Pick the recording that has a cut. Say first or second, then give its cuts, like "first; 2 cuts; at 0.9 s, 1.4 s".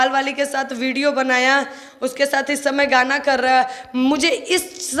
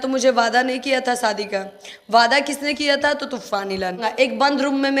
second; 1 cut; at 4.0 s